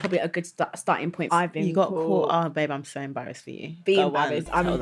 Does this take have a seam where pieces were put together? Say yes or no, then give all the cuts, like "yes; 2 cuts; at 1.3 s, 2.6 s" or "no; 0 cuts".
yes; 1 cut; at 1.3 s